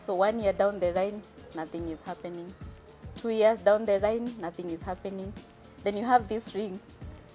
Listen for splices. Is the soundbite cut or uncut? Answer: uncut